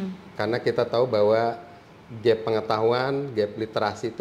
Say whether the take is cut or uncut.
uncut